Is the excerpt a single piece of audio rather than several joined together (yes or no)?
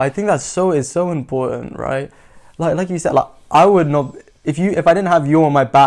yes